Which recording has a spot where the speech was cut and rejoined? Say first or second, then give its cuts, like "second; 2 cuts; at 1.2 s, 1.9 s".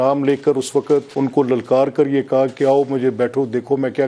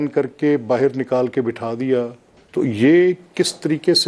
first; 1 cut; at 1.1 s